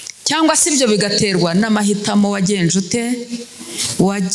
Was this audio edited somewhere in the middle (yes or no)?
no